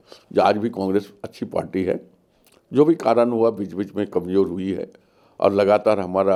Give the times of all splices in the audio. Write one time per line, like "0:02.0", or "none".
none